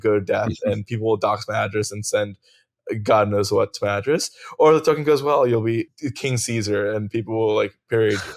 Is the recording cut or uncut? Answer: cut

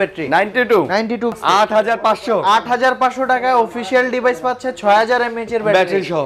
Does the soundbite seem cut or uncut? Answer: cut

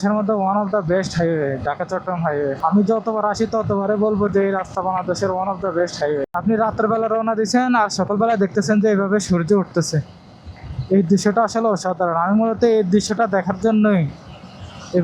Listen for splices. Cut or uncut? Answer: cut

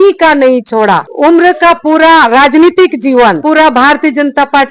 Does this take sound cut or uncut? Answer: cut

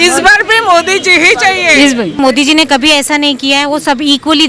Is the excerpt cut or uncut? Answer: cut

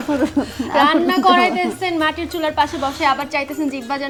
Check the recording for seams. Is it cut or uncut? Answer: uncut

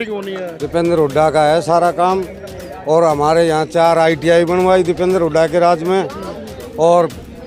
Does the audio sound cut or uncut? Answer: uncut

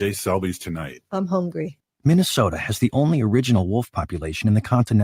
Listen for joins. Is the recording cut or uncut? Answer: cut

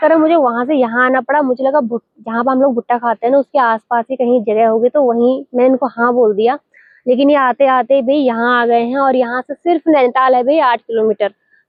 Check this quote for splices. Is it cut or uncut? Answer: uncut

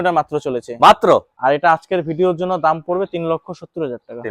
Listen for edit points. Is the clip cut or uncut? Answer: cut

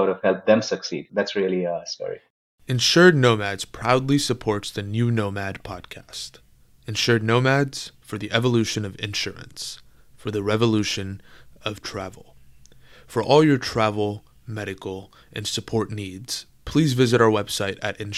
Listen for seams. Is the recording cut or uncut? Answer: cut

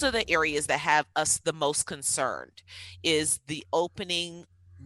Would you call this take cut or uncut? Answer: uncut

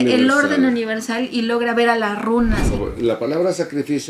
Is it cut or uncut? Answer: cut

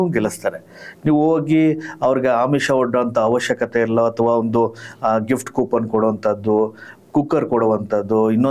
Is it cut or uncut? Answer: uncut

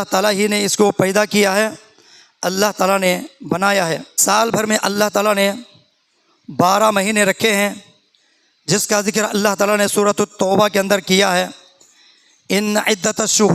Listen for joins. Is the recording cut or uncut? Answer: cut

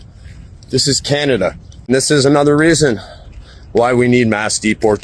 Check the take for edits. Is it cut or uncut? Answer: cut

